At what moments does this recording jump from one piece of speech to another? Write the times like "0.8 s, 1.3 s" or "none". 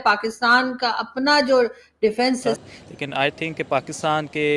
2.6 s